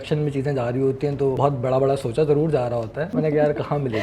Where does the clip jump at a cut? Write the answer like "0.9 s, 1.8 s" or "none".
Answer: 1.4 s, 3.1 s